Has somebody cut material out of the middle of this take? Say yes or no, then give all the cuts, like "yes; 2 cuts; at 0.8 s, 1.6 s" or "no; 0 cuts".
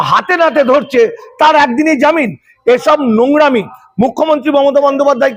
no; 0 cuts